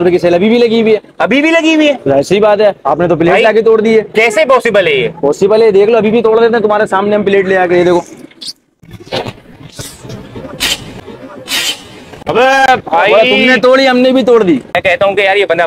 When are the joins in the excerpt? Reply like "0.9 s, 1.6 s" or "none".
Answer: none